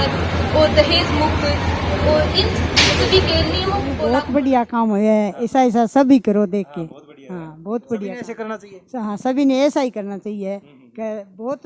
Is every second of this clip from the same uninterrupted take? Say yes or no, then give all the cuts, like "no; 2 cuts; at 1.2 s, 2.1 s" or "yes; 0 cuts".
no; 1 cut; at 3.9 s